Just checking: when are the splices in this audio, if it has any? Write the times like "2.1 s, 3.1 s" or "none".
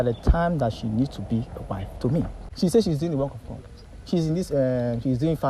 2.4 s